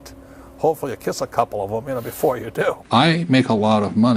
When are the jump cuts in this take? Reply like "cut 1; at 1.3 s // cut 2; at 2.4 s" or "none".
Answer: cut 1; at 2.8 s